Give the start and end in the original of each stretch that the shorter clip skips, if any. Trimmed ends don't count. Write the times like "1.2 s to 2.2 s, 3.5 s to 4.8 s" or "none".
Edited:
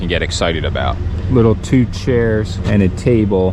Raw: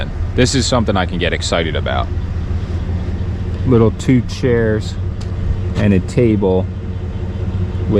2.2 s to 3.5 s, 4.9 s to 5.7 s